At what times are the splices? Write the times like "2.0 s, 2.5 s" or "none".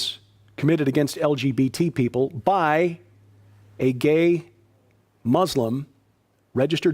3.0 s